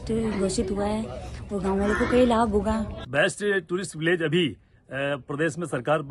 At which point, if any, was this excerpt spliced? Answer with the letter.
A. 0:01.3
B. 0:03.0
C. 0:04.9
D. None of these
B